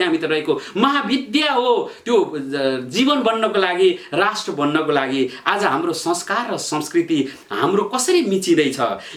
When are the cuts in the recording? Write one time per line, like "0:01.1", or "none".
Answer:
none